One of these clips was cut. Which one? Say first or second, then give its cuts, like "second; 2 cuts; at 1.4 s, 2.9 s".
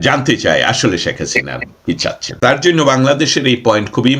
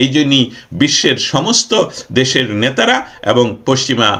first; 1 cut; at 2.2 s